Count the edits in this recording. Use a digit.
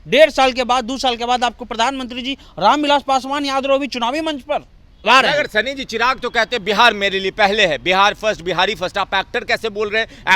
1